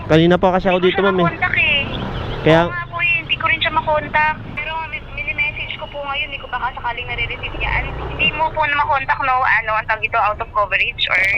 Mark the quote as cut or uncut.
cut